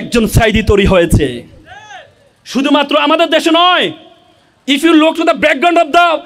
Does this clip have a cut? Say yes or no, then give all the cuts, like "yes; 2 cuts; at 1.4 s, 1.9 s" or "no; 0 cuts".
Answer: no; 0 cuts